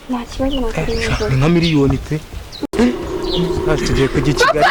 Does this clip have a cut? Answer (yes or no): yes